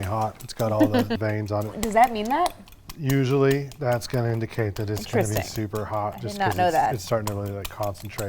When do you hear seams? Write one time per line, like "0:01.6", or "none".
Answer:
0:01.7